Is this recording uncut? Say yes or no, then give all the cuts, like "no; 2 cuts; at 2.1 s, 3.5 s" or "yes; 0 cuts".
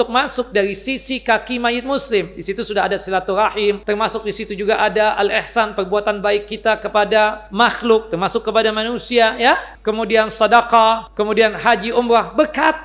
no; 4 cuts; at 3.8 s, 7.4 s, 9.7 s, 11.1 s